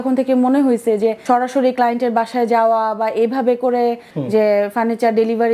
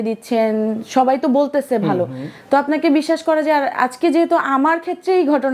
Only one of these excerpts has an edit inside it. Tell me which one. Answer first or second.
first